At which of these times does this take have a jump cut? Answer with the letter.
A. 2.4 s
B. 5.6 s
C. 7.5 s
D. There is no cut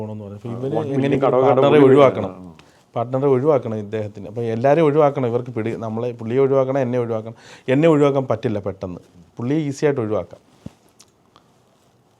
D